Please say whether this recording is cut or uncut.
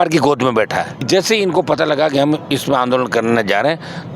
cut